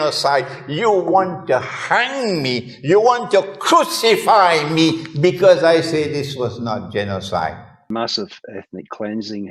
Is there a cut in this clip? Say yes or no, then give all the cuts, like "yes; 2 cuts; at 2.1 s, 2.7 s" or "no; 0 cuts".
yes; 1 cut; at 7.9 s